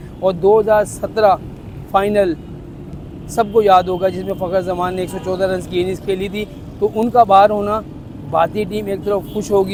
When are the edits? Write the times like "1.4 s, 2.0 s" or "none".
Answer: none